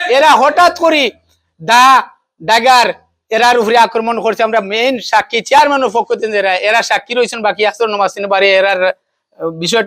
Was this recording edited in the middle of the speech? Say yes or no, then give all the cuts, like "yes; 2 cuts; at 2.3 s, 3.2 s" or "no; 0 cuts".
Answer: no; 0 cuts